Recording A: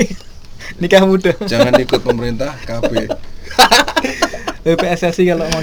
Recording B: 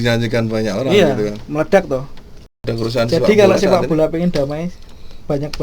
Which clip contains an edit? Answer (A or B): B